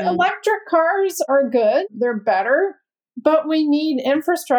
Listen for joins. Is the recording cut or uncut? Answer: uncut